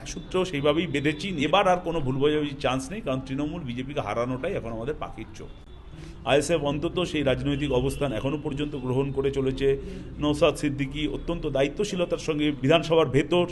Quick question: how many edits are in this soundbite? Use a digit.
3